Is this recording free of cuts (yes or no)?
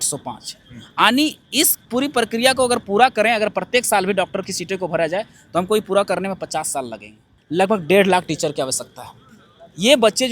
no